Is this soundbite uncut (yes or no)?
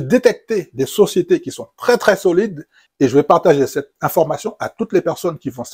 yes